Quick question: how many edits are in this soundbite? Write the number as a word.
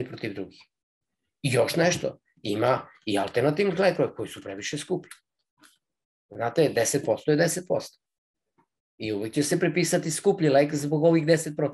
zero